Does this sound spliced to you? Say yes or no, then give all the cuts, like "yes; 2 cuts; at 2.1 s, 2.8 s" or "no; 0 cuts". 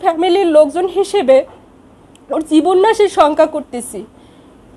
no; 0 cuts